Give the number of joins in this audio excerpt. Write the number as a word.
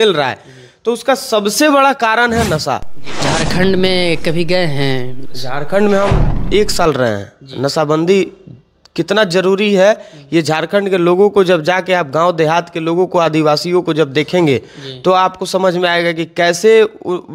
one